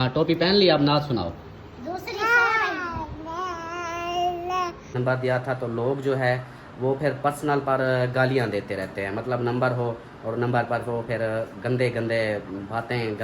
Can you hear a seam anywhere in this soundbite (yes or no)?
yes